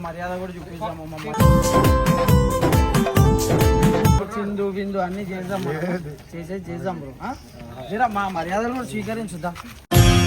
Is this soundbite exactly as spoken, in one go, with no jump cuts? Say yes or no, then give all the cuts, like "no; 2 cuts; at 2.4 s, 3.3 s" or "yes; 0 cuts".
no; 1 cut; at 4.2 s